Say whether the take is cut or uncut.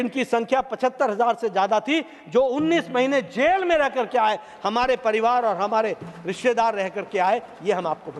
uncut